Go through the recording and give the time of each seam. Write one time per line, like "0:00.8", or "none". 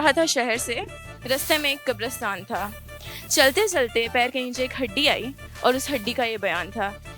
none